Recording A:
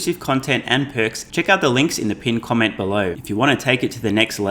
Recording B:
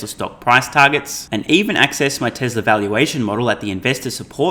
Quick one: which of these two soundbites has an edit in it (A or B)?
A